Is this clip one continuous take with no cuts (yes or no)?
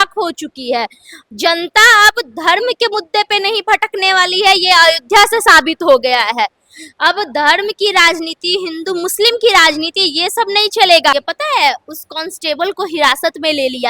no